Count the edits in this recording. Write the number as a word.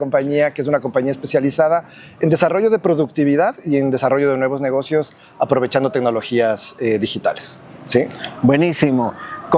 zero